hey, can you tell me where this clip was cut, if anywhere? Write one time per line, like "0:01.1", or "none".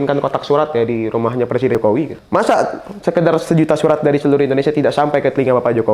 0:01.8